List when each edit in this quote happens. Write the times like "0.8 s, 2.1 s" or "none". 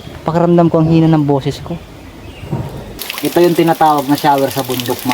2.9 s